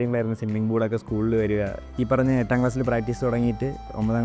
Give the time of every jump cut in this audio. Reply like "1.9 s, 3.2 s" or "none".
1.8 s